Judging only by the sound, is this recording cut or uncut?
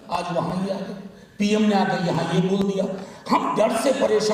uncut